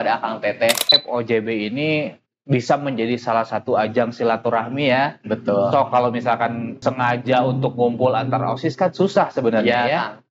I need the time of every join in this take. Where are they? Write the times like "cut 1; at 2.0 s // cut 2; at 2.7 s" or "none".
cut 1; at 1.0 s // cut 2; at 6.8 s